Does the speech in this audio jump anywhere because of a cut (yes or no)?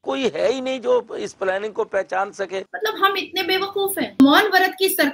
yes